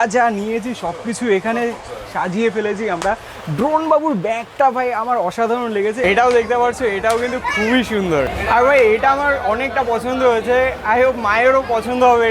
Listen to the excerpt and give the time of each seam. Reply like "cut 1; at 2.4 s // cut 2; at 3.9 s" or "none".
cut 1; at 6.0 s